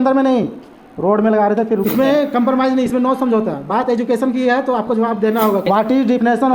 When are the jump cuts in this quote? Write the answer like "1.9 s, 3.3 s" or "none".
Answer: 1.9 s, 5.6 s

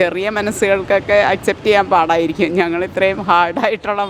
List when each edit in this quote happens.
none

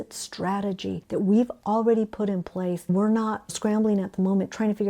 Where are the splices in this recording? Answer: 2.9 s

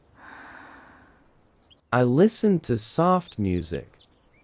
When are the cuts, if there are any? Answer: 1.0 s

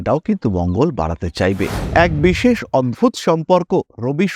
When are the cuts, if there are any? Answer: 1.8 s

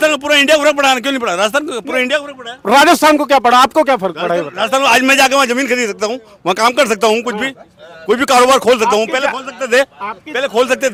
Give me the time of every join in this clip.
none

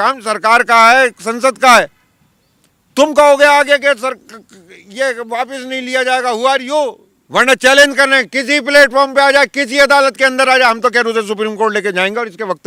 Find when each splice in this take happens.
none

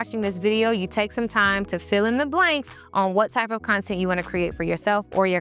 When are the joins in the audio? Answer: none

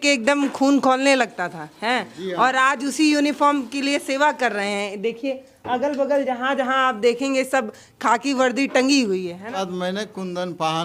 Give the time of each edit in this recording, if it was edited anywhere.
9.6 s

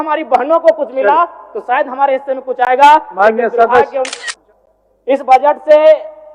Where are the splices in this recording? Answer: 4.2 s

